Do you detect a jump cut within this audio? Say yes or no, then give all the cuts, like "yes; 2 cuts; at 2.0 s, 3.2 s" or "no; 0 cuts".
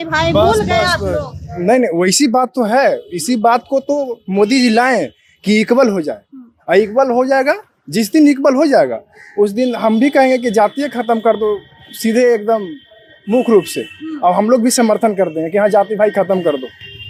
no; 0 cuts